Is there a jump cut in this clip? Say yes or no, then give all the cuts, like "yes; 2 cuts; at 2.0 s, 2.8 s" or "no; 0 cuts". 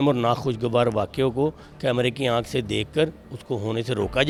no; 0 cuts